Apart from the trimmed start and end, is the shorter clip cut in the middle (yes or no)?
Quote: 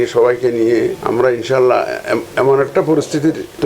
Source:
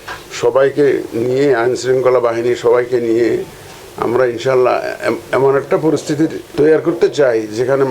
yes